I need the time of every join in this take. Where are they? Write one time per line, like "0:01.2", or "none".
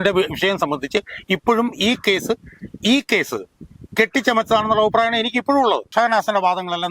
0:05.9